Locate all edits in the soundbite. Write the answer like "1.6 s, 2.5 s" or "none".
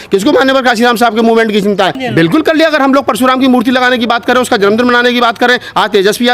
2.0 s